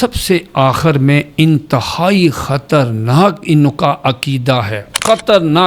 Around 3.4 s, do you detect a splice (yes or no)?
no